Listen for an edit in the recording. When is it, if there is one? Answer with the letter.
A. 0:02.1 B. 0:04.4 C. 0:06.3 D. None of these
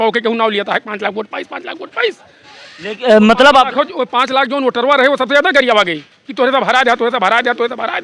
D